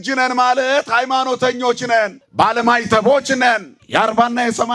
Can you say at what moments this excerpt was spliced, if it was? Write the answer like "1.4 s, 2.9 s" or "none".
2.2 s, 3.7 s